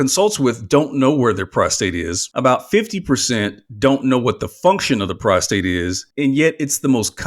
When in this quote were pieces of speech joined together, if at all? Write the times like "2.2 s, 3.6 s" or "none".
2.2 s, 6.0 s